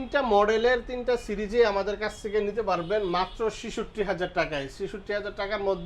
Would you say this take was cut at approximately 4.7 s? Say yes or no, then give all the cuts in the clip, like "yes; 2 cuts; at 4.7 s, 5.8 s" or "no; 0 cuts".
no; 0 cuts